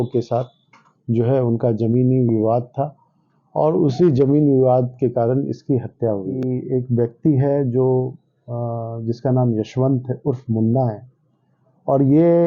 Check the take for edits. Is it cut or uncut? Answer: cut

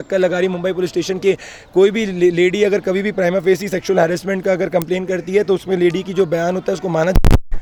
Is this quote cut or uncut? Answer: uncut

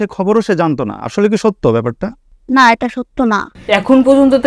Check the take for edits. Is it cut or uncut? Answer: cut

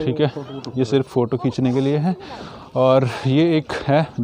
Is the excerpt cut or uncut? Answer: uncut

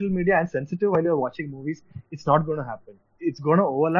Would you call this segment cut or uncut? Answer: uncut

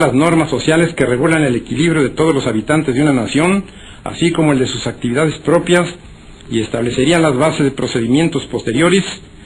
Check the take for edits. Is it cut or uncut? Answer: cut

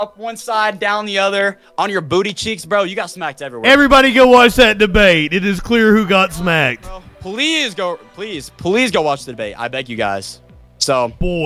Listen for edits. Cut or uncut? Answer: uncut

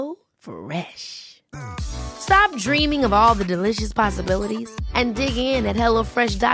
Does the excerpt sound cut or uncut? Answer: uncut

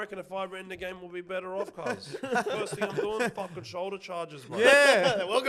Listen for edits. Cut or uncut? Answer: uncut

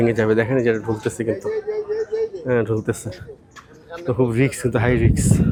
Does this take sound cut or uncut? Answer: uncut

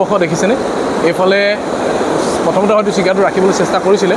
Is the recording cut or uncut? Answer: uncut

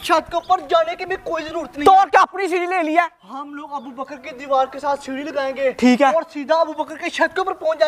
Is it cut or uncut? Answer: uncut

